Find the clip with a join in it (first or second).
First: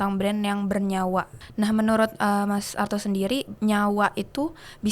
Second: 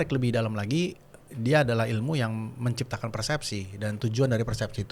first